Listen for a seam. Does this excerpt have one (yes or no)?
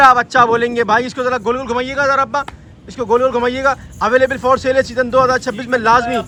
no